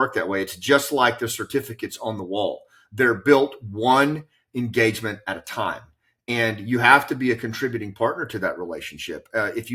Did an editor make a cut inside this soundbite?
no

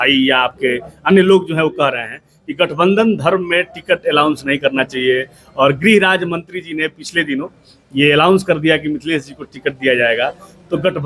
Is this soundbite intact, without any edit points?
yes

